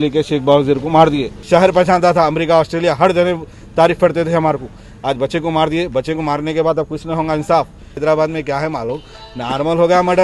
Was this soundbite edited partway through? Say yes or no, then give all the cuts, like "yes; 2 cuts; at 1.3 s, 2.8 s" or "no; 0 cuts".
yes; 2 cuts; at 1.3 s, 7.9 s